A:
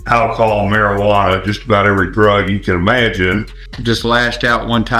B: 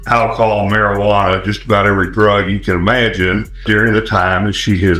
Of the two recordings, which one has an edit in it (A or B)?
A